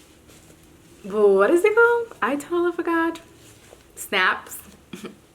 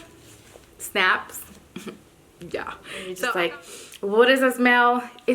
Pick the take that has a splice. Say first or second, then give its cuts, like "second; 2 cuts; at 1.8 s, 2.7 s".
second; 1 cut; at 3.1 s